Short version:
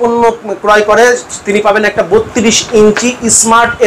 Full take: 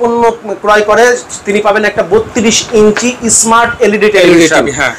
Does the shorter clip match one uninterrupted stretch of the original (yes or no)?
yes